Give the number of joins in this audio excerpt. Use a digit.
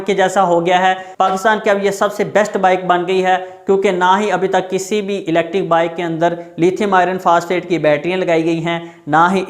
1